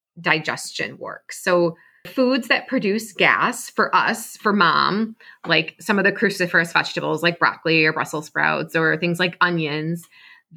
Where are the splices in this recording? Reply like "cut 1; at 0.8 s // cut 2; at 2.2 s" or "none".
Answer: cut 1; at 2.1 s